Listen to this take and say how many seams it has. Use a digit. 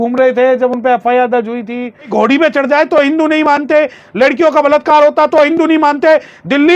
1